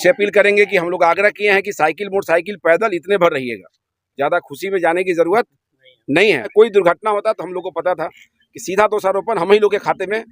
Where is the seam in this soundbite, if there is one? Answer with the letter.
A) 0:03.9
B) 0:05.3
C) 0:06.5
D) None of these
C